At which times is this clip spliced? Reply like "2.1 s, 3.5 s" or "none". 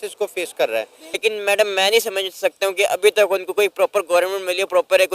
1.0 s